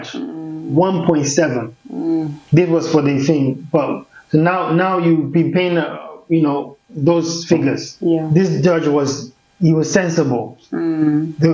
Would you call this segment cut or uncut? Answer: cut